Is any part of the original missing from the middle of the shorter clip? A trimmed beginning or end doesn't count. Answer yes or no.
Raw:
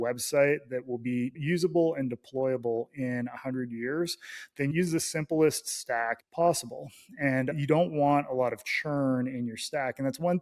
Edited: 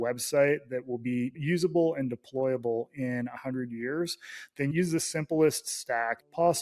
no